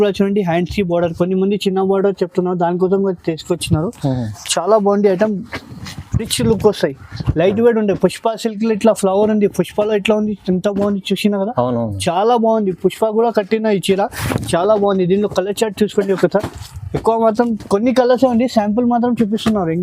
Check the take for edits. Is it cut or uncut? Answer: uncut